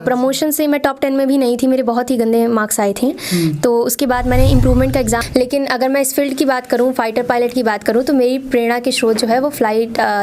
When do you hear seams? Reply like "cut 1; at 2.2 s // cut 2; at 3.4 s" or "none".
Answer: cut 1; at 5.2 s